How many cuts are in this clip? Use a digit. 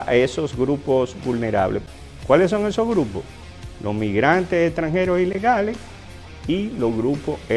1